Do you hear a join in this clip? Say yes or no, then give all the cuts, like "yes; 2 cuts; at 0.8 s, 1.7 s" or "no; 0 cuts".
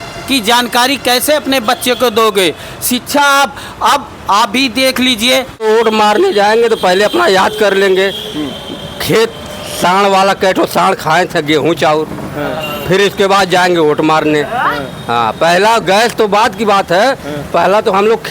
yes; 1 cut; at 5.6 s